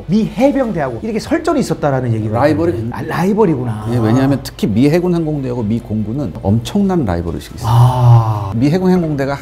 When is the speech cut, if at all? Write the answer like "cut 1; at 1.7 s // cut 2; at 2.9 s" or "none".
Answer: cut 1; at 8.5 s